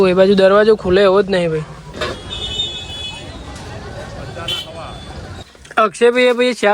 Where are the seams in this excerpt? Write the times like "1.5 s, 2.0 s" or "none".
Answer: 1.8 s, 5.5 s

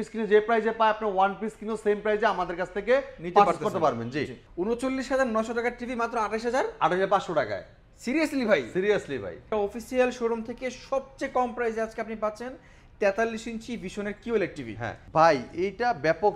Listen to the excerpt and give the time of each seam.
4.3 s, 9.4 s, 15.0 s

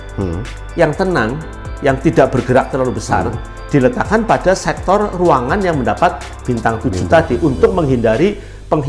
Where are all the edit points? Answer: none

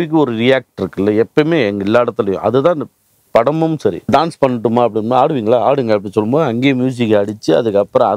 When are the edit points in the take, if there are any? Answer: 4.1 s

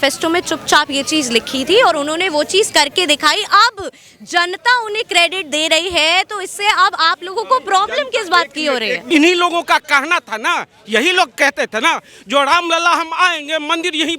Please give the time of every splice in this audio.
9.0 s

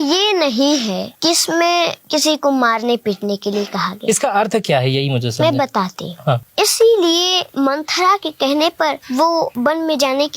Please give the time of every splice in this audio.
1.1 s, 2.0 s, 6.5 s, 7.4 s, 9.4 s

